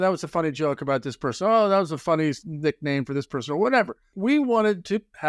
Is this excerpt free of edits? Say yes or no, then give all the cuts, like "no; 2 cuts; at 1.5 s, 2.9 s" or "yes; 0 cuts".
yes; 0 cuts